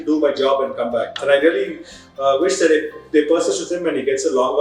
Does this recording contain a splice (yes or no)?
yes